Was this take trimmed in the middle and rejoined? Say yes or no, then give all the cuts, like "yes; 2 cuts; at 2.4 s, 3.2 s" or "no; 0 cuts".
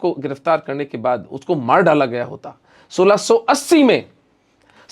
no; 0 cuts